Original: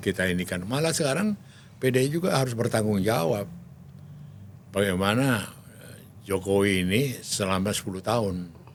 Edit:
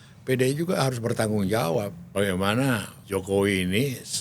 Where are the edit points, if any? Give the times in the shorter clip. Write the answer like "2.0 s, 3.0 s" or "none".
2.0 s, 2.9 s